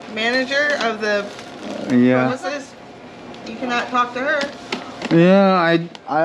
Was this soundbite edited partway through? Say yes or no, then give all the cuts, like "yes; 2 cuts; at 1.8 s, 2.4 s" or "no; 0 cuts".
no; 0 cuts